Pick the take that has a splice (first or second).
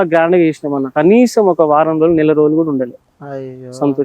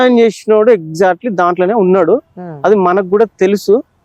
first